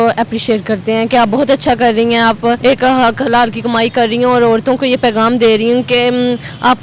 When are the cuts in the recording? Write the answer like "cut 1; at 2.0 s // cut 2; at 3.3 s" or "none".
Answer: cut 1; at 2.6 s